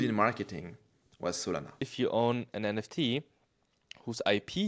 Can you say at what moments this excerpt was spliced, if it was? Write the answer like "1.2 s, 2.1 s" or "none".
1.9 s